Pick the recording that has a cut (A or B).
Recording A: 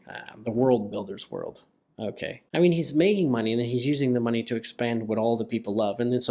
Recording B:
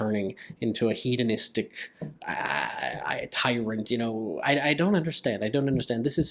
A